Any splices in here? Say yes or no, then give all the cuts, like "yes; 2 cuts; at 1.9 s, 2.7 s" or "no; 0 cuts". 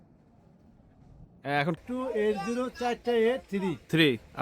yes; 1 cut; at 1.8 s